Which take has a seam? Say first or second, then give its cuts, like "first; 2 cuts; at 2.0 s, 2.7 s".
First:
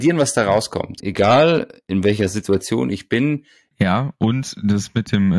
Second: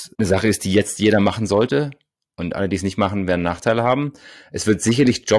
first; 2 cuts; at 1.0 s, 3.7 s